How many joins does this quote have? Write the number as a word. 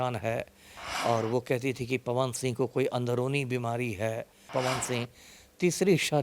one